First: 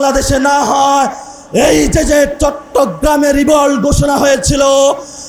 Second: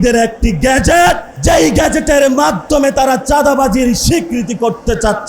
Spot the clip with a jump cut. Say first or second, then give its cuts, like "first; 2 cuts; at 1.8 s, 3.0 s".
second; 1 cut; at 1.3 s